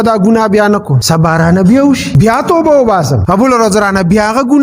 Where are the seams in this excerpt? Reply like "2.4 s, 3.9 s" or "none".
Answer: 0.9 s, 2.1 s, 3.2 s